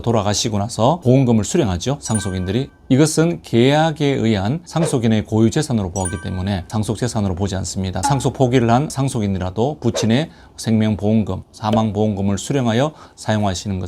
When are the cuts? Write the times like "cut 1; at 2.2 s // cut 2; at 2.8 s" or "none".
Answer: cut 1; at 1.0 s // cut 2; at 2.7 s // cut 3; at 6.7 s // cut 4; at 8.0 s